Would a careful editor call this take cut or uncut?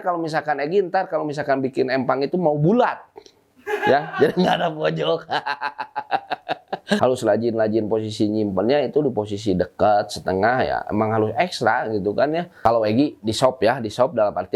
cut